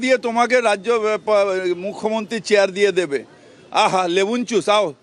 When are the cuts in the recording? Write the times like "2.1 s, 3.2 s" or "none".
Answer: none